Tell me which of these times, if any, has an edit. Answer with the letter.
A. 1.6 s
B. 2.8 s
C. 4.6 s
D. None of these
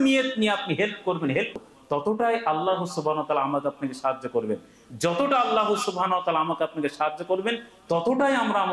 A